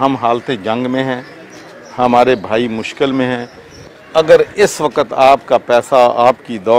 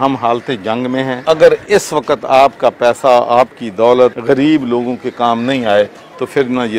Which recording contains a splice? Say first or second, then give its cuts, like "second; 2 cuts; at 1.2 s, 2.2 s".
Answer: second; 2 cuts; at 1.2 s, 4.2 s